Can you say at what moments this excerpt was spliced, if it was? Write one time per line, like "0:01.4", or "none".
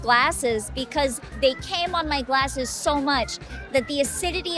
0:01.3